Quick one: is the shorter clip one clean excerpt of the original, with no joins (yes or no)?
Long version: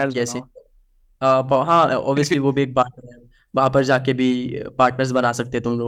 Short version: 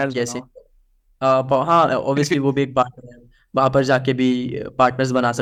yes